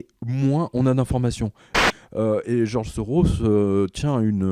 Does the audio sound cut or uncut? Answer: cut